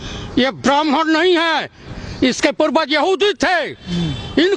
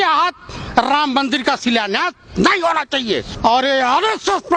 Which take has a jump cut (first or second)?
second